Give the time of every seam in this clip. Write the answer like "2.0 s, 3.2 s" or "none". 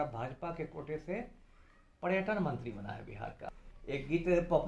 3.5 s